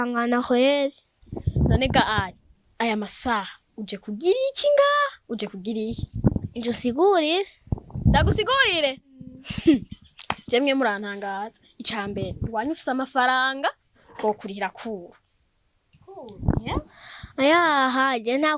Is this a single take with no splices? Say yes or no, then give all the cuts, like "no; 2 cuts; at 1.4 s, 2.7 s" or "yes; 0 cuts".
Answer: yes; 0 cuts